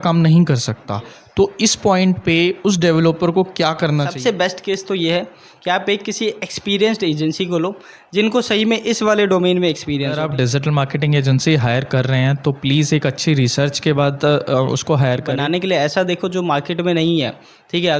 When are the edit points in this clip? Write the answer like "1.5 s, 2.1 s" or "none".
4.1 s, 10.2 s, 15.3 s